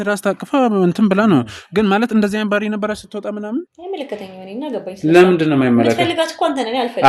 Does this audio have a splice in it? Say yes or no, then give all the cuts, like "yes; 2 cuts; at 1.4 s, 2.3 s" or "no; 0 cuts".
yes; 1 cut; at 3.8 s